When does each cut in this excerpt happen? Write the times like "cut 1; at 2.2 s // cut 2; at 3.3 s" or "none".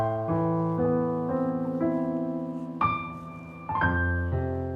none